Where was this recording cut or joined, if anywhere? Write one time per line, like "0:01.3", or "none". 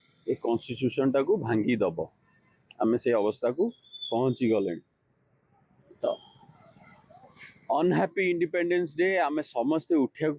none